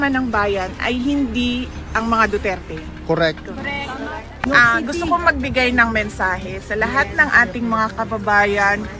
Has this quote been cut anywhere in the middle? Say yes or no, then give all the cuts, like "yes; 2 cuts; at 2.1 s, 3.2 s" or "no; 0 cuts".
yes; 1 cut; at 4.2 s